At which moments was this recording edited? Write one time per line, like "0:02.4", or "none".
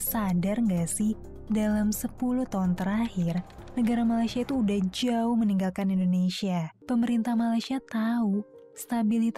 0:06.7